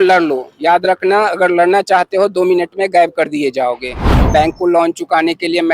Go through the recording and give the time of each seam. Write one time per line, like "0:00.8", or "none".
0:04.1